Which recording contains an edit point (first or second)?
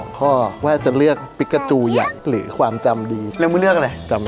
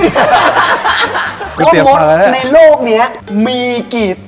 second